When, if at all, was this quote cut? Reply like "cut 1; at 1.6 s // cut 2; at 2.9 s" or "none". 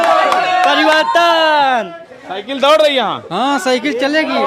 none